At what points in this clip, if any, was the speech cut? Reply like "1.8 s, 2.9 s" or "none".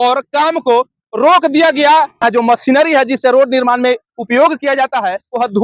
2.2 s